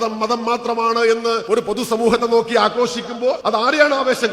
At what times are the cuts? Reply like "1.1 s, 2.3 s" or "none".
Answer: 1.4 s, 3.4 s